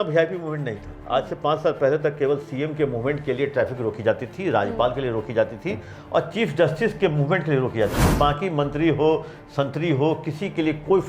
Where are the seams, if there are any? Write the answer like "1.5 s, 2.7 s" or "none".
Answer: none